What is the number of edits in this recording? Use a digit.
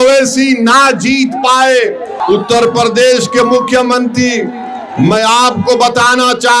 1